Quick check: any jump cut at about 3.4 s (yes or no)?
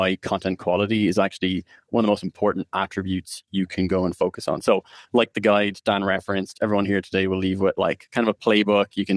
no